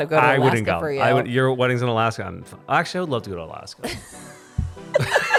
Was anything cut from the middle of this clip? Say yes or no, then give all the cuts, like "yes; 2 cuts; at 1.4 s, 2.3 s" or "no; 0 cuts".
no; 0 cuts